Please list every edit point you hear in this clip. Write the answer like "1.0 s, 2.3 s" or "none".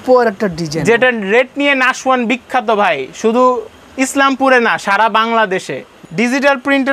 none